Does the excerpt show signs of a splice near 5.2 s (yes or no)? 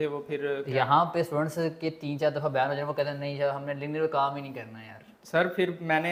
no